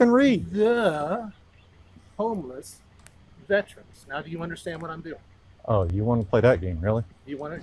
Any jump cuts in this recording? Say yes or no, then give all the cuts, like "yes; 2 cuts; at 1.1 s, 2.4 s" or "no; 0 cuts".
no; 0 cuts